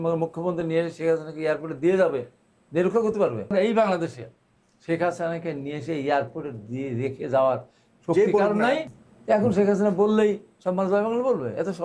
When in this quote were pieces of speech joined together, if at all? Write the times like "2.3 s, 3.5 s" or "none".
3.5 s, 8.9 s